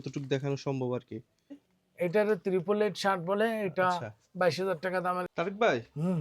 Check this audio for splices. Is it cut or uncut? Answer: cut